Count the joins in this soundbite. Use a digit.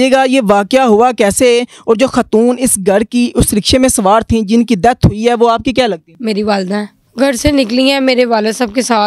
2